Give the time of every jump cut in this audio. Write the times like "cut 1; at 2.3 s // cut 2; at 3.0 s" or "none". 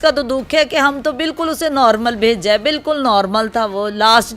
none